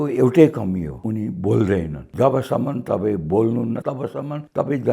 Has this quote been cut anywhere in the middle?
yes; 3 cuts; at 0.9 s, 2.0 s, 3.9 s

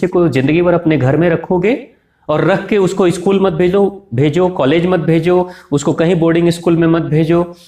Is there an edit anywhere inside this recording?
no; 0 cuts

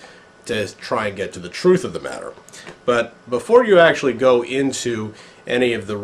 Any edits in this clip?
yes; 1 cut; at 4.2 s

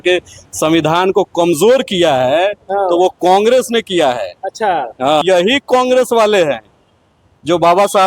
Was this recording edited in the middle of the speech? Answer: yes; 1 cut; at 5.2 s

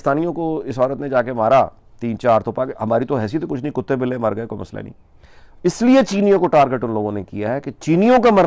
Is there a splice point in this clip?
no; 0 cuts

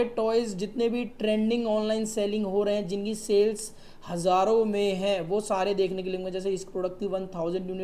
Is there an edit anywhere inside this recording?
no; 0 cuts

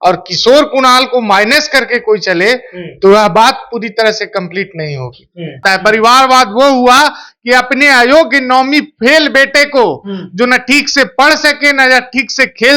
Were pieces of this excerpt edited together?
yes; 1 cut; at 5.6 s

